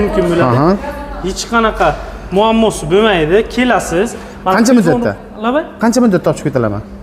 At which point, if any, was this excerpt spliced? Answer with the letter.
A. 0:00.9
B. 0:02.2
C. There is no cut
C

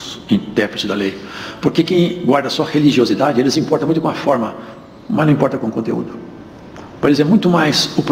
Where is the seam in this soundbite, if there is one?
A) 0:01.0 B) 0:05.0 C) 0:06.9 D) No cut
C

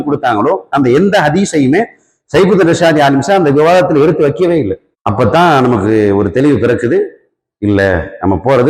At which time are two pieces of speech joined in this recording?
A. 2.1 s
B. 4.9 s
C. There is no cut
C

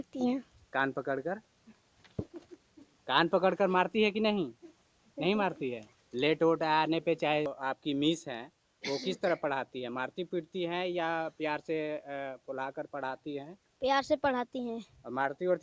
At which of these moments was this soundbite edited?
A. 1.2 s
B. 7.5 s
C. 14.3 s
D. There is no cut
B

